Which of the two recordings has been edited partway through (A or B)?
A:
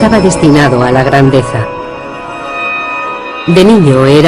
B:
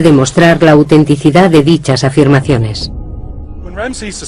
B